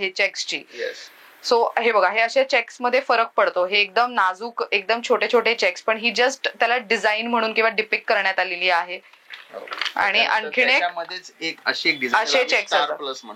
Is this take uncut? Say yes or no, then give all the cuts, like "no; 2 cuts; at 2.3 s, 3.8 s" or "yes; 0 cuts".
yes; 0 cuts